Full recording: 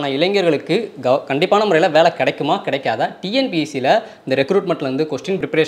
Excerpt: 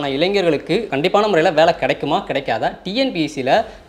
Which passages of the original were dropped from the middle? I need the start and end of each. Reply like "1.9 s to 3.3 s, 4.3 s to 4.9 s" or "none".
0.9 s to 1.3 s